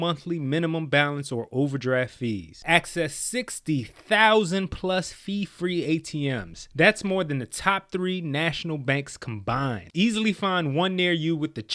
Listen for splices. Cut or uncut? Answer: uncut